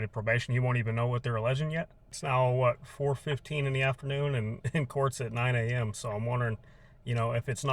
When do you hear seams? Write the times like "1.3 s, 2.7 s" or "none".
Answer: 2.2 s